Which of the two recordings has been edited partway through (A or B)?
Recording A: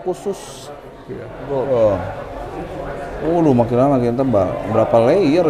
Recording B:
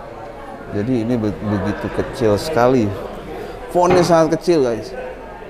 A